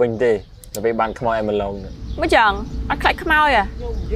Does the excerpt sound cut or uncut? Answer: uncut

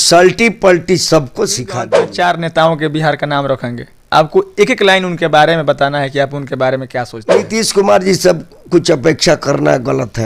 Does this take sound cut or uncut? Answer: cut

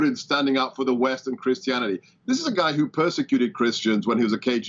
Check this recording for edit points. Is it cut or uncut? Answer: uncut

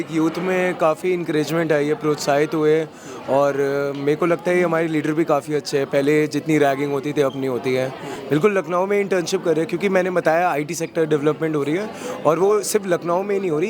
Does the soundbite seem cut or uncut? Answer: cut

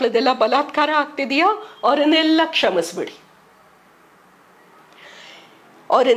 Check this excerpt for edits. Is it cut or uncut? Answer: uncut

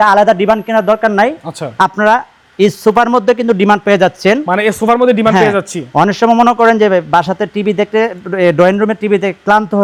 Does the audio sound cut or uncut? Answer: uncut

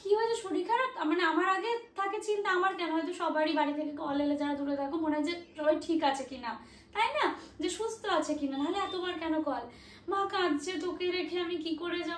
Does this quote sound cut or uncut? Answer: uncut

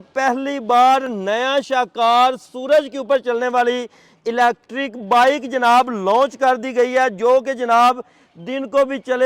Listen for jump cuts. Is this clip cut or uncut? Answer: uncut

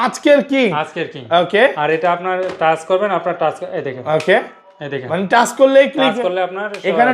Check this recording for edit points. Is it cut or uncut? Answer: uncut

